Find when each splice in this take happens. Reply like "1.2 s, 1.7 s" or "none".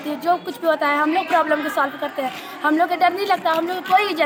none